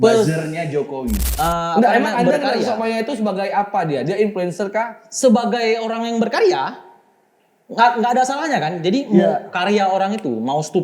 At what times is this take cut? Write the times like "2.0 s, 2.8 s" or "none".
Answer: 1.2 s